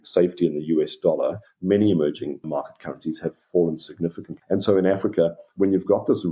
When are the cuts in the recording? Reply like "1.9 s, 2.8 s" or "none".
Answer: 2.4 s, 4.2 s

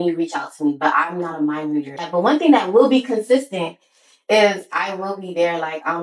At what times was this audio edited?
2.1 s

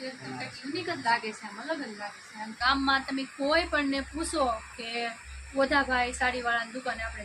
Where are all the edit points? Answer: 2.5 s

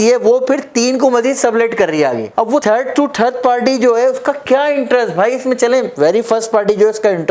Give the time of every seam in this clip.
none

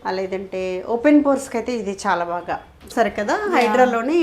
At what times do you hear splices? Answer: 2.9 s

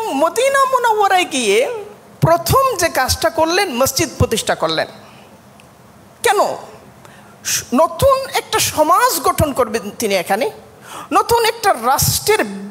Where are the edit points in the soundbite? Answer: none

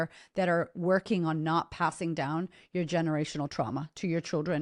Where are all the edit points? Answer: none

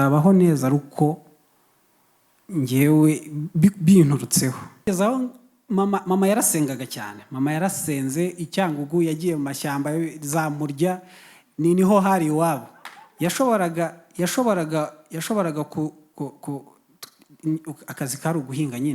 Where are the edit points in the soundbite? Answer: 4.9 s

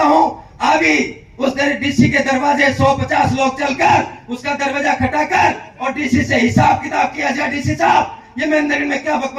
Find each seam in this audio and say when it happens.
none

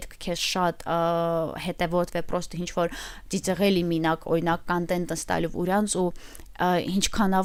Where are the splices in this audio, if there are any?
none

